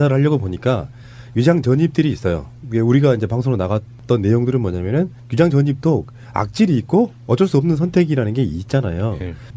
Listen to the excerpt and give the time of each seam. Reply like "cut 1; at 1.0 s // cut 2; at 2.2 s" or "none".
cut 1; at 7.3 s